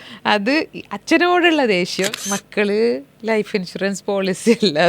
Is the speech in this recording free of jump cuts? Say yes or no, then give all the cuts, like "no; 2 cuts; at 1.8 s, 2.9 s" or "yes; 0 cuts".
no; 1 cut; at 2.1 s